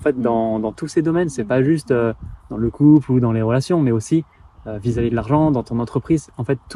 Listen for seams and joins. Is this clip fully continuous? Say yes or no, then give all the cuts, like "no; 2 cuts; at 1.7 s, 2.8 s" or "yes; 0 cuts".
yes; 0 cuts